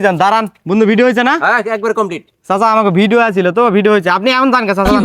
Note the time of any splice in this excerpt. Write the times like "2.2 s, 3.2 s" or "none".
none